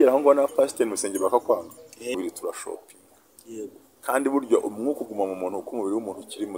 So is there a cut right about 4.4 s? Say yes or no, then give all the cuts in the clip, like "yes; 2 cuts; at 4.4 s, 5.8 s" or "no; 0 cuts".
no; 1 cut; at 2.1 s